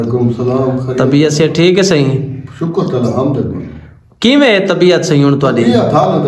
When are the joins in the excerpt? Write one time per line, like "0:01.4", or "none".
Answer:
none